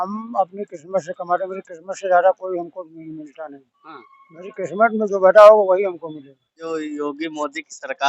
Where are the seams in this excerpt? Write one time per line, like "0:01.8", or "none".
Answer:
0:06.7